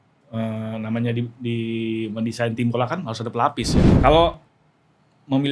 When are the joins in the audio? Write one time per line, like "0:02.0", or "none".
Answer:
0:03.8